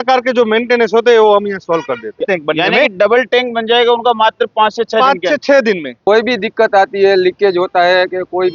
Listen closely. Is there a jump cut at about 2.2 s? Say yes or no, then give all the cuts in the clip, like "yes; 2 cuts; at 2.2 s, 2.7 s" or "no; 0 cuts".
yes; 2 cuts; at 2.2 s, 5.9 s